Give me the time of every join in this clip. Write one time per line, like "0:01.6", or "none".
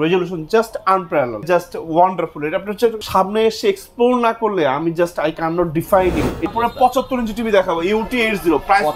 0:01.4
0:03.0
0:06.5